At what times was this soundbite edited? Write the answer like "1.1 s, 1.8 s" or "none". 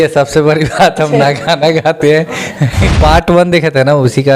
3.0 s